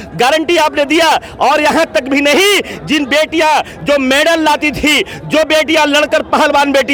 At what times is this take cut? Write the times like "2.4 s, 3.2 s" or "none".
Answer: none